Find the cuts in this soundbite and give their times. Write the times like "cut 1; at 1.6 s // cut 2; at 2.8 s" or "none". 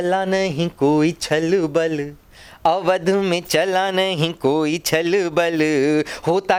none